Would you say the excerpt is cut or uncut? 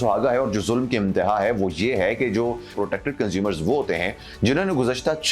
cut